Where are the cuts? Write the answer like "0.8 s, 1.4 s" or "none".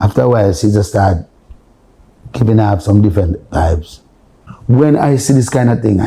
4.5 s

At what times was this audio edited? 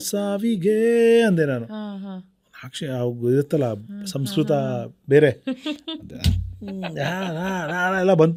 none

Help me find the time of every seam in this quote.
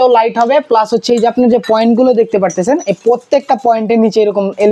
none

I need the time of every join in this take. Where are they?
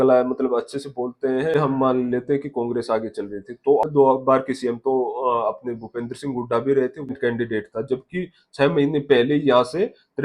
1.5 s, 3.8 s, 7.1 s

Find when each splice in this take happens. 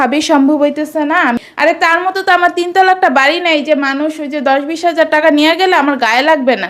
1.1 s

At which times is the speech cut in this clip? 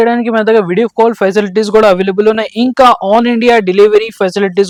none

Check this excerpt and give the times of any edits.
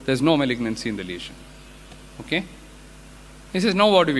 none

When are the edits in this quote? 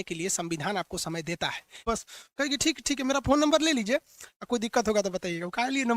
1.6 s

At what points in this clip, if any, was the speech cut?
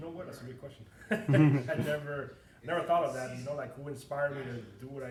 none

